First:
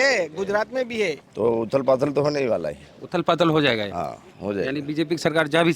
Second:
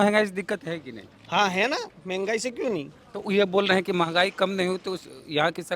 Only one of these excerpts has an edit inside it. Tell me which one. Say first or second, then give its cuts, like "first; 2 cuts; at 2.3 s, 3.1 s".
first; 1 cut; at 1.2 s